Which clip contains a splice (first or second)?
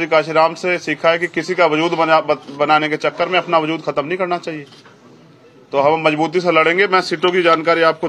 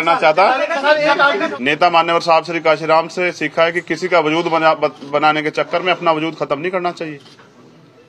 second